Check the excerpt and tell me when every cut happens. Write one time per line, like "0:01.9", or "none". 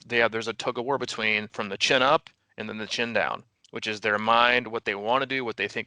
0:01.5

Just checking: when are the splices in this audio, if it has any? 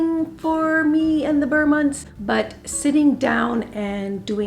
none

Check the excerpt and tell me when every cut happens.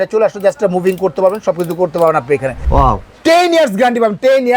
0:02.5

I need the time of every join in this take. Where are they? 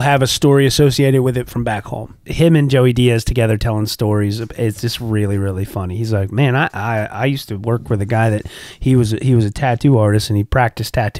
0:02.2

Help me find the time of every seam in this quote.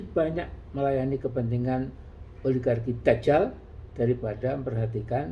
none

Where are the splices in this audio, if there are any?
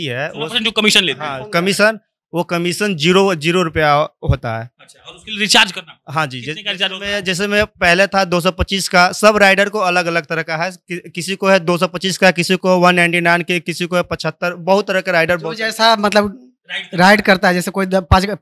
none

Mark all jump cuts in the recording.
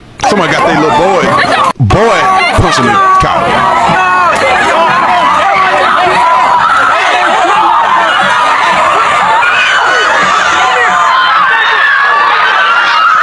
none

